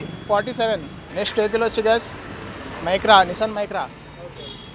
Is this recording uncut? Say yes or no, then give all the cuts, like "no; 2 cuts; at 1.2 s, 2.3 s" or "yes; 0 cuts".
no; 1 cut; at 1.0 s